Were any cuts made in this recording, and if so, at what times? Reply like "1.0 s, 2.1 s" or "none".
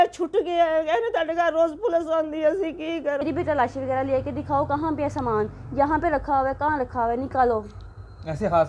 3.2 s